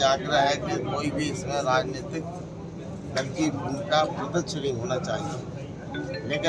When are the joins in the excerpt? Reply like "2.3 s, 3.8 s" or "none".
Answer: none